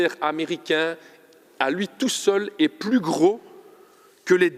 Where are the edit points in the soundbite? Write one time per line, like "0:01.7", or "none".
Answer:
none